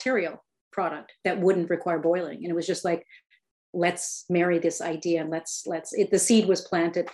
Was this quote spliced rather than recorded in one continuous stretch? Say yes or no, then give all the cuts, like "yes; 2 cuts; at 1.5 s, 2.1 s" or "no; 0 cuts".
no; 0 cuts